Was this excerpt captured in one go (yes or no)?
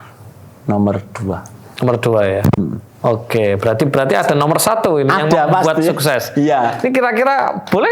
yes